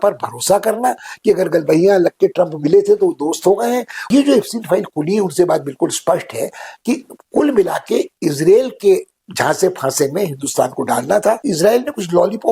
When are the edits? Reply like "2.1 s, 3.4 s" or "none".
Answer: 4.1 s, 11.4 s